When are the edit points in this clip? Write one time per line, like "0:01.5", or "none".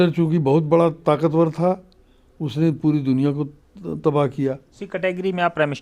0:04.8